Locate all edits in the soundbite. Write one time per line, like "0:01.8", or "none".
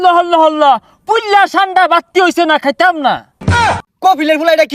0:03.5